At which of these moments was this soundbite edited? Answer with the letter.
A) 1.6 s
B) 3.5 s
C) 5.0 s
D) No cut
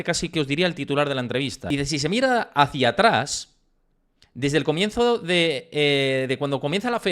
A